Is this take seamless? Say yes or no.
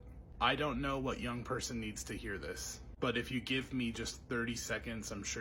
yes